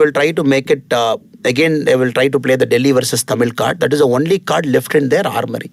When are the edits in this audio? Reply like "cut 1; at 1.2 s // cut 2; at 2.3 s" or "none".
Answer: none